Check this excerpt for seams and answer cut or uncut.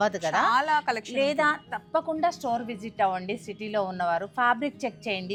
uncut